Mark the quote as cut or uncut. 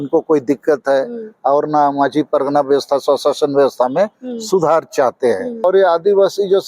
cut